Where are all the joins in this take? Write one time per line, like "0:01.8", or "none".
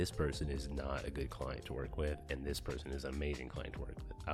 none